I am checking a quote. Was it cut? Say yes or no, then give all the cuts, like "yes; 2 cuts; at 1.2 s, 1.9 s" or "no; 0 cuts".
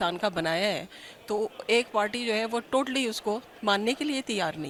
no; 0 cuts